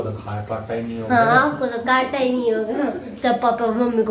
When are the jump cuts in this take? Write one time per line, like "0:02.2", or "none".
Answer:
0:03.2